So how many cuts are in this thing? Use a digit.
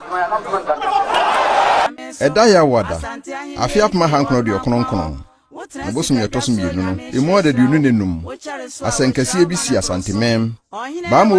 1